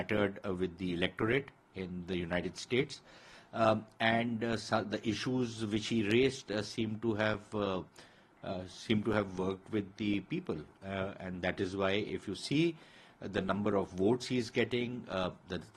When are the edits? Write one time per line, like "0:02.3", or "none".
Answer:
none